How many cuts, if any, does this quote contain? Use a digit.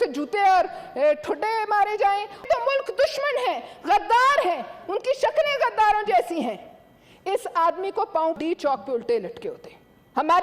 2